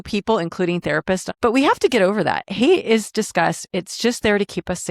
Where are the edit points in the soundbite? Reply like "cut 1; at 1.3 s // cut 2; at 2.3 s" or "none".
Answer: cut 1; at 1.3 s

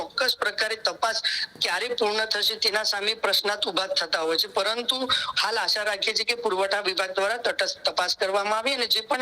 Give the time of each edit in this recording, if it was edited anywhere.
none

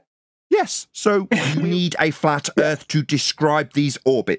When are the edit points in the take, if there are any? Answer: cut 1; at 1.5 s

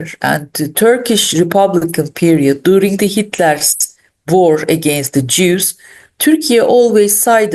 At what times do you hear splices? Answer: none

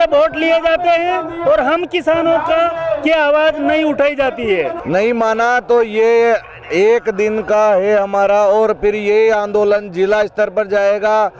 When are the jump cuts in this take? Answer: cut 1; at 4.8 s

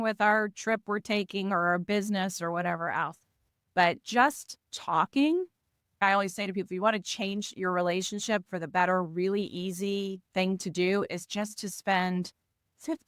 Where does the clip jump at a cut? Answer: cut 1; at 6.0 s

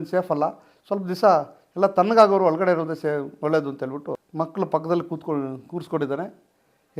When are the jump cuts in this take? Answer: cut 1; at 4.2 s

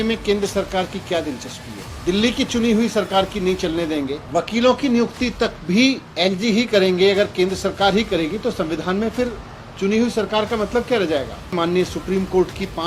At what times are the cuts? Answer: cut 1; at 1.8 s // cut 2; at 4.2 s

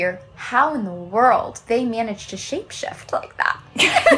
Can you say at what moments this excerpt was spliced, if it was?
cut 1; at 1.6 s

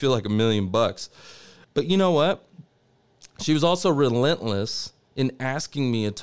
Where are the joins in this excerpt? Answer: cut 1; at 1.6 s

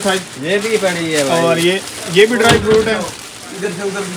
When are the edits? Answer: none

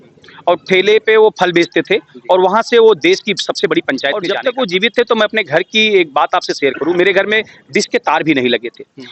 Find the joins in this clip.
cut 1; at 4.3 s

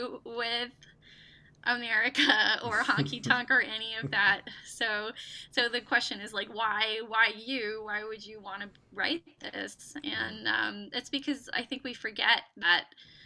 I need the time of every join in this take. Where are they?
none

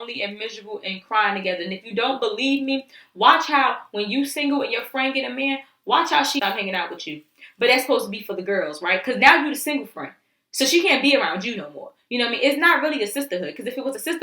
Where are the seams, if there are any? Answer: cut 1; at 6.4 s

